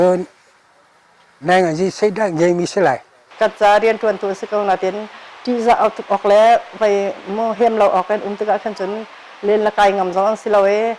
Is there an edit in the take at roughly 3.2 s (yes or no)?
yes